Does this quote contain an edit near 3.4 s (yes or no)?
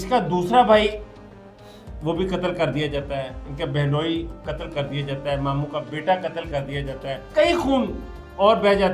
yes